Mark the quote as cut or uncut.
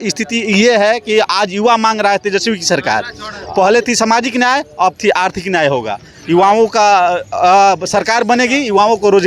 uncut